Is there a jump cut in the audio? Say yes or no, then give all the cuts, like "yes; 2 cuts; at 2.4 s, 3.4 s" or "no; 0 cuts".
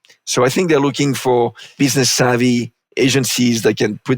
yes; 2 cuts; at 1.7 s, 2.8 s